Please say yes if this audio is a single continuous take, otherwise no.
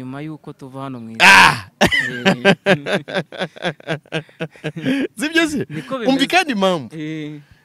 yes